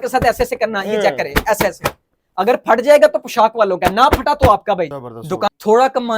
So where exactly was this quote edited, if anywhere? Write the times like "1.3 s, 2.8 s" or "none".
5.2 s

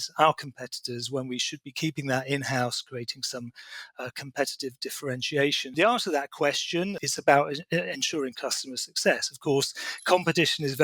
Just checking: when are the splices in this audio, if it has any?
5.7 s, 7.0 s

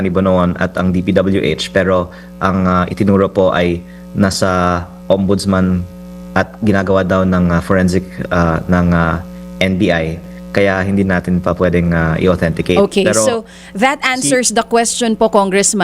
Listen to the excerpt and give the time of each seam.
none

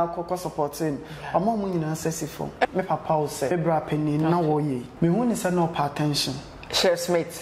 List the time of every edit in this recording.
2.7 s, 3.5 s, 4.9 s

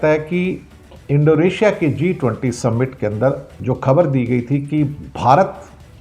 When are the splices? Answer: 3.5 s, 5.0 s

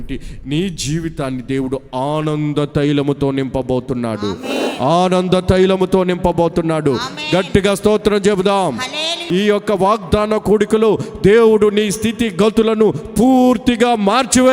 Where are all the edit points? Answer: 9.2 s

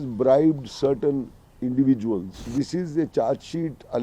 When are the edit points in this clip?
2.5 s

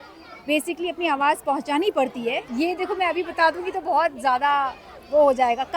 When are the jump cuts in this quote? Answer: 2.5 s

